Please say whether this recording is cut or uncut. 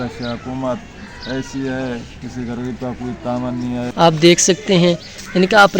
cut